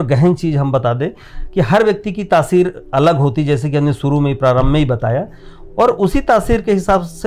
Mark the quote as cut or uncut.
uncut